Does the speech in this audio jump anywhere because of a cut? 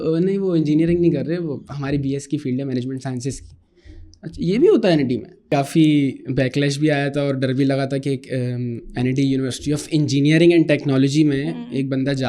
yes; 1 cut; at 5.5 s

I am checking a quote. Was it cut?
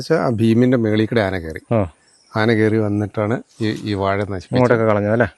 no; 0 cuts

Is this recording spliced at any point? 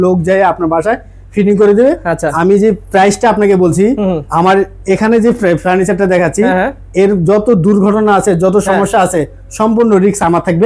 no; 0 cuts

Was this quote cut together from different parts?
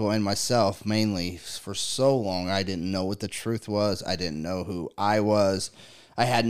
no; 0 cuts

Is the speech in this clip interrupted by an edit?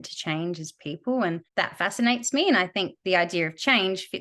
yes; 1 cut; at 1.4 s

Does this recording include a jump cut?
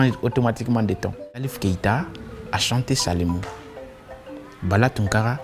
yes; 1 cut; at 1.5 s

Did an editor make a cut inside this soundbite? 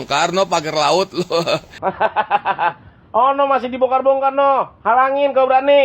yes; 1 cut; at 1.7 s

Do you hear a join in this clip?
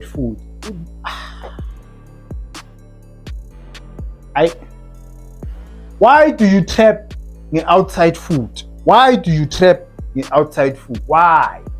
no; 0 cuts

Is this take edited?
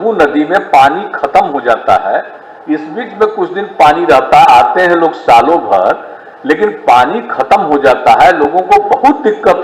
no; 0 cuts

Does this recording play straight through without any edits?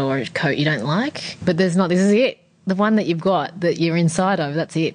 no; 1 cut; at 1.3 s

